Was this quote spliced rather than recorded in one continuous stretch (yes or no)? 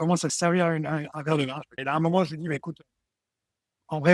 yes